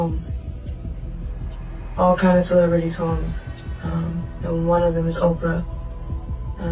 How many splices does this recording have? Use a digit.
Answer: 0